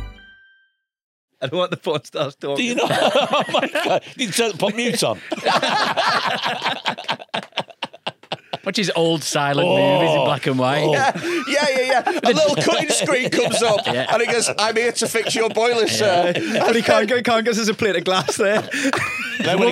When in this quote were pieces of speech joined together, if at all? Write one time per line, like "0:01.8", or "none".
0:01.3